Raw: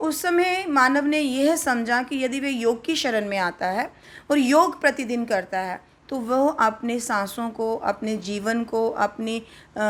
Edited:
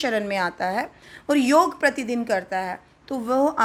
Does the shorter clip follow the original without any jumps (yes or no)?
yes